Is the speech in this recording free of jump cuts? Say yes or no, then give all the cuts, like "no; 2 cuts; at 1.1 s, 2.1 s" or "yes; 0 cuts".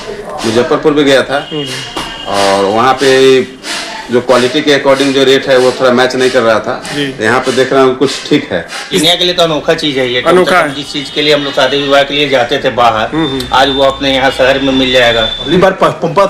no; 2 cuts; at 8.8 s, 15.4 s